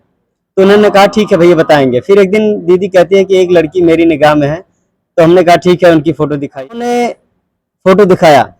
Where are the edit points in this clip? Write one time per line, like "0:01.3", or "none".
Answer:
0:06.6